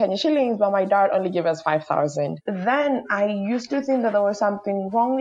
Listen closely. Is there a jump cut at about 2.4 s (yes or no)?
yes